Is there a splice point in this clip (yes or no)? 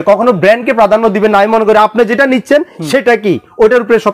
no